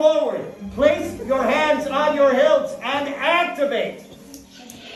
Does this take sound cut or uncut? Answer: uncut